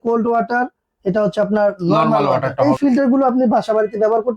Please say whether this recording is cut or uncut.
cut